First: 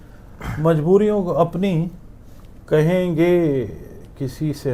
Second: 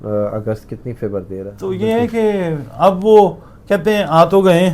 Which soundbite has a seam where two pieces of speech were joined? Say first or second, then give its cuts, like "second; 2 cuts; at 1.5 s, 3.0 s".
second; 1 cut; at 1.5 s